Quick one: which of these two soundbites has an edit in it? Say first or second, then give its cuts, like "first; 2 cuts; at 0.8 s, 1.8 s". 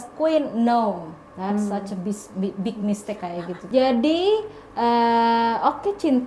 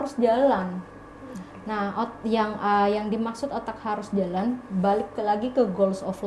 first; 1 cut; at 3.6 s